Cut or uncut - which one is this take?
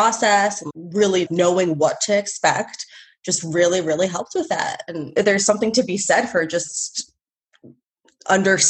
uncut